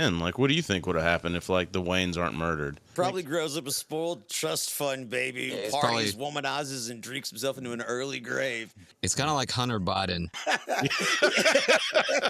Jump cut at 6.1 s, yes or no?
no